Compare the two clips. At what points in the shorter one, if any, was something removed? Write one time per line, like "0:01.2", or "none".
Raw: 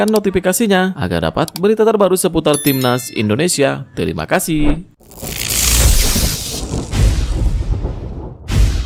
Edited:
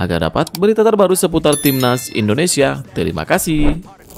none